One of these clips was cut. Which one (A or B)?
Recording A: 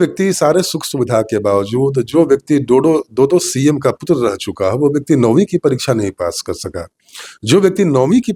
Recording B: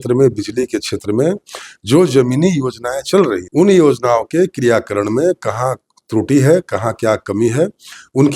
B